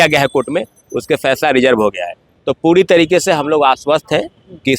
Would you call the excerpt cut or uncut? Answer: uncut